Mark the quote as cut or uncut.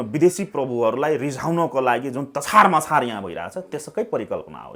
uncut